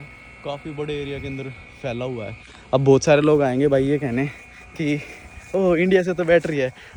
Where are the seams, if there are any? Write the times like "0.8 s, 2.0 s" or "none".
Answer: none